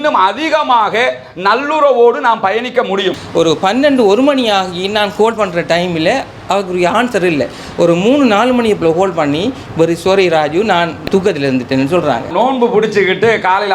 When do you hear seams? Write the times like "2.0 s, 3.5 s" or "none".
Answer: 3.2 s, 12.3 s